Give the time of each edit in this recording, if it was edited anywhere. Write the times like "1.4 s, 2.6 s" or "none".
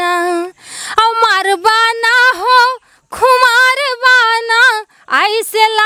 none